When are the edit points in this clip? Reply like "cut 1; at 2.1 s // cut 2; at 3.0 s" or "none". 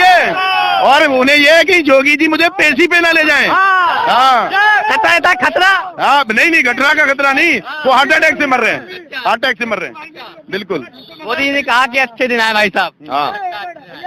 none